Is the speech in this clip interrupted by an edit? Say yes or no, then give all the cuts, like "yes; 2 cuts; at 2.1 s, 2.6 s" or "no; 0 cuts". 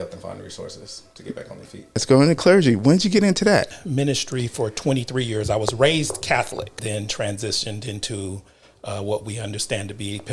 yes; 3 cuts; at 2.0 s, 3.8 s, 6.8 s